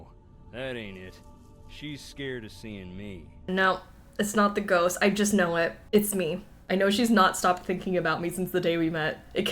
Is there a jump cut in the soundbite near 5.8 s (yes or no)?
yes